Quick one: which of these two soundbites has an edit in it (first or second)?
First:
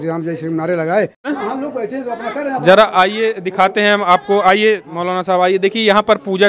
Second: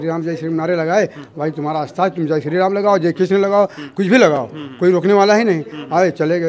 first